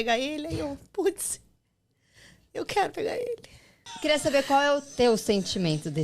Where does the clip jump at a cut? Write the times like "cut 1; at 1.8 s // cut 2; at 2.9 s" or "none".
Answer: cut 1; at 4.0 s